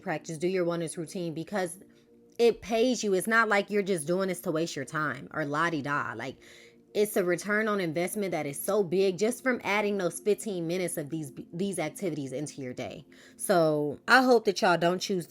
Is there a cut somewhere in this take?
yes; 1 cut; at 13.9 s

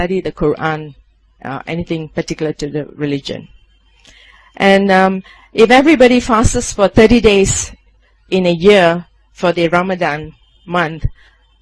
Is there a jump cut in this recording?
no; 0 cuts

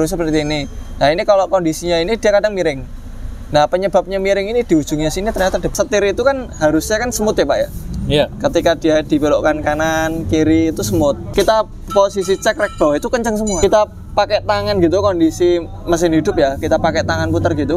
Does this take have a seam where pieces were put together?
yes; 3 cuts; at 5.7 s, 11.2 s, 13.6 s

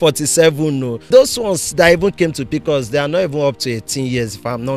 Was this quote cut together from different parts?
yes; 1 cut; at 1.0 s

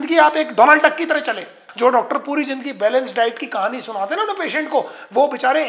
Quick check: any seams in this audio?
yes; 1 cut; at 1.6 s

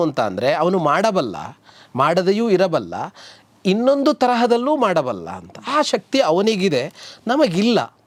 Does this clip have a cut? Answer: no; 0 cuts

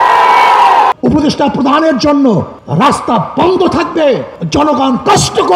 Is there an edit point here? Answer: yes; 3 cuts; at 0.9 s, 2.6 s, 4.3 s

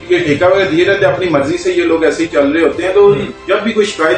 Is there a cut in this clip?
no; 0 cuts

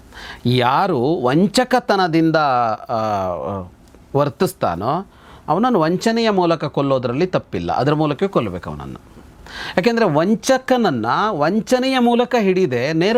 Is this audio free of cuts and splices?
yes; 0 cuts

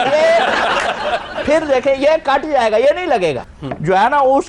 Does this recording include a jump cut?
yes; 1 cut; at 3.5 s

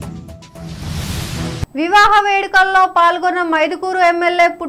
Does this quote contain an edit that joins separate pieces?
yes; 1 cut; at 1.4 s

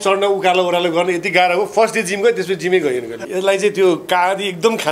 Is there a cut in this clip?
yes; 1 cut; at 3.2 s

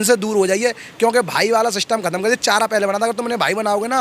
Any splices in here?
no; 0 cuts

